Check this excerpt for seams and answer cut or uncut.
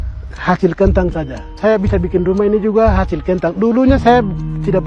uncut